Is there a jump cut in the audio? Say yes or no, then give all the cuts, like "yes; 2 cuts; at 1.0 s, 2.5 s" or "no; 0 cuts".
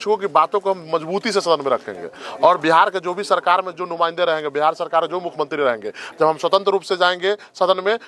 no; 0 cuts